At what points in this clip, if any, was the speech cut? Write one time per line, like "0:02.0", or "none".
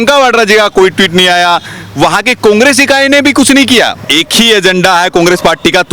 0:04.0